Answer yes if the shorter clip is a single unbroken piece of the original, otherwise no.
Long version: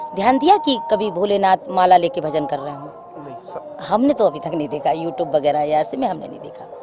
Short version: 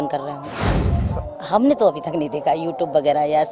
yes